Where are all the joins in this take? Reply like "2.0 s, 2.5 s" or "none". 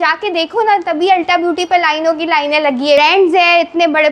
3.0 s

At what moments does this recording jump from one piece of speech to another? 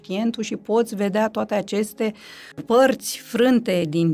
2.5 s

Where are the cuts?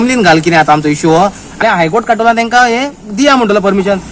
1.6 s

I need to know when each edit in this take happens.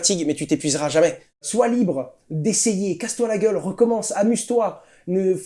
1.5 s

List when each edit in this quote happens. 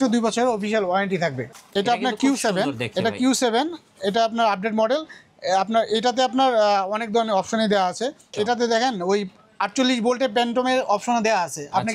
1.5 s, 8.3 s

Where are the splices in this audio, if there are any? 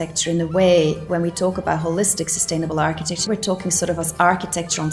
1.0 s, 3.3 s

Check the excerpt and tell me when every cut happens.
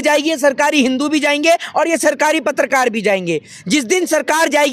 none

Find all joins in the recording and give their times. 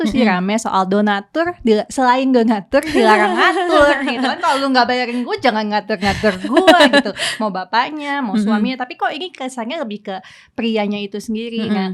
none

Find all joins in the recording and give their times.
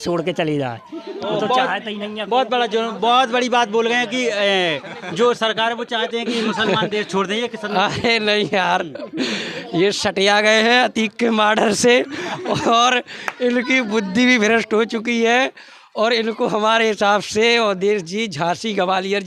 none

